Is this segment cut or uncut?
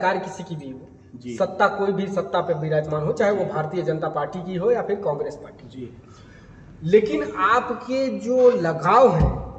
uncut